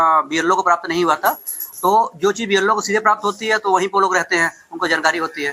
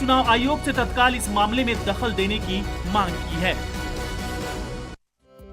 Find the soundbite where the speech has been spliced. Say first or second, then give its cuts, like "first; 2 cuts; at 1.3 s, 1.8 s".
second; 1 cut; at 2.1 s